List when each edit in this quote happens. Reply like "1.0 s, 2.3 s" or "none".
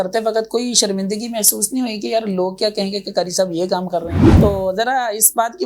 4.2 s

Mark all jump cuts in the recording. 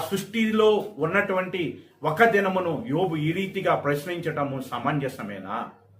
none

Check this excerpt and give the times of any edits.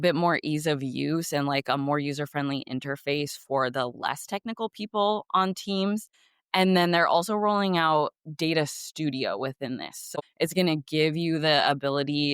10.1 s

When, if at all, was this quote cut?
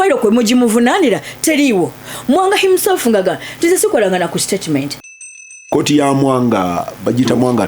5.5 s

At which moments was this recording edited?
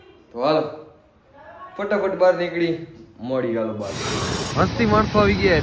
4.0 s

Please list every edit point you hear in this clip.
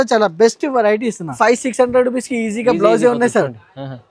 1.3 s

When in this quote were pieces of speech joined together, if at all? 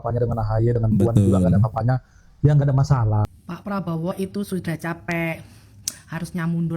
3.3 s

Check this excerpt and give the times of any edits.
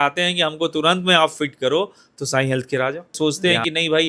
3.2 s

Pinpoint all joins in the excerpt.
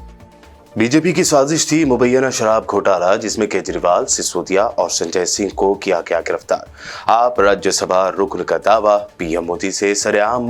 none

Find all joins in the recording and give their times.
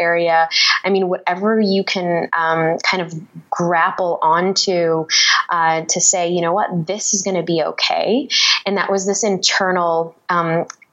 none

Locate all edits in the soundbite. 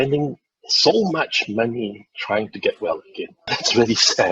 3.4 s

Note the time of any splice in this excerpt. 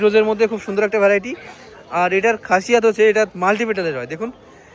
none

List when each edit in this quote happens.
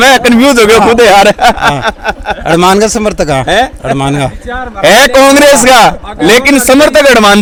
none

